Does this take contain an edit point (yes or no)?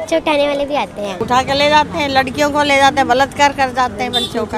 no